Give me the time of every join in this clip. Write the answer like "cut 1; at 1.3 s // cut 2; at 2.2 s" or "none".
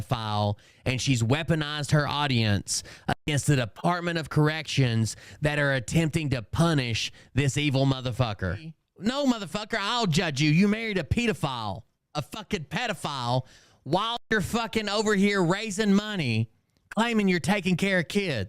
cut 1; at 8.8 s